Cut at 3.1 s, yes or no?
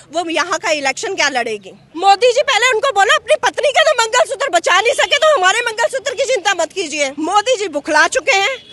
no